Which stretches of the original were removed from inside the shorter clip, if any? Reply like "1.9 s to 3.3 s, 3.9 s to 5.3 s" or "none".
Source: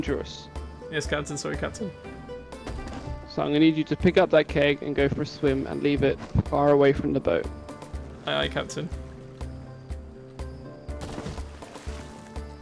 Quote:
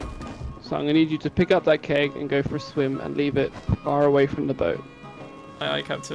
none